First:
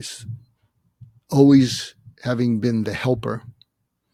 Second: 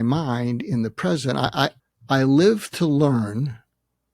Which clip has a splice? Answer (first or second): second